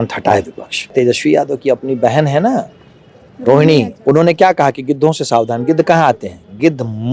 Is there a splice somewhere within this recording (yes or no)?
yes